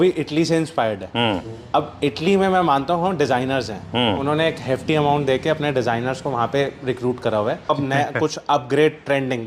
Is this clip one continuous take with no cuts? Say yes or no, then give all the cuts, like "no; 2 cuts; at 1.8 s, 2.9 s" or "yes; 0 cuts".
no; 1 cut; at 7.7 s